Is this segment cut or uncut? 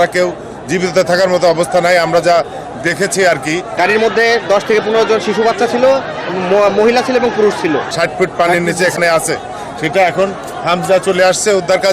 cut